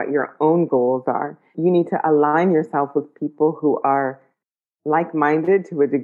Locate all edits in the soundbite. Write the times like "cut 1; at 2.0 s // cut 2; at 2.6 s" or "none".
cut 1; at 1.5 s